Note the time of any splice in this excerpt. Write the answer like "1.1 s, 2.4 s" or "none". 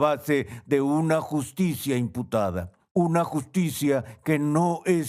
2.7 s